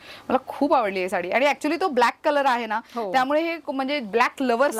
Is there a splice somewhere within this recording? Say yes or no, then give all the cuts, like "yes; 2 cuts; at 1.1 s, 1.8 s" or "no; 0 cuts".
no; 0 cuts